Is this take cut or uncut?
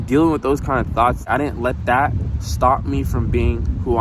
cut